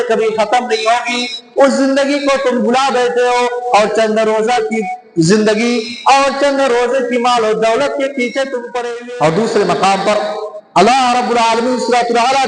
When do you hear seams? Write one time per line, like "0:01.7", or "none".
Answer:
0:08.7